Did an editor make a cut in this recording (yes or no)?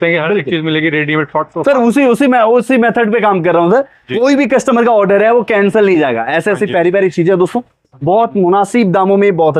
no